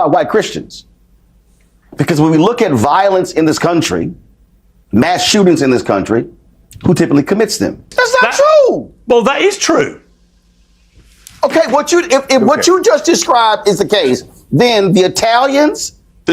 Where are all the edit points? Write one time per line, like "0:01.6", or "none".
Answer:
0:07.9